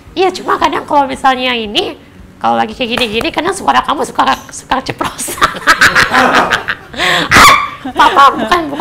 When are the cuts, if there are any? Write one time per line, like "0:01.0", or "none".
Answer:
none

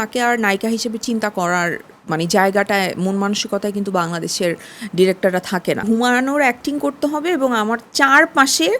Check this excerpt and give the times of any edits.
0:05.8

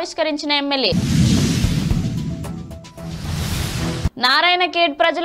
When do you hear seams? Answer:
none

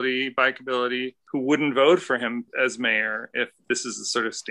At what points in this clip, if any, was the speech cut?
0:01.2

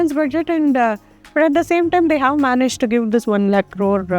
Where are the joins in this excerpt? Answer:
0:01.2

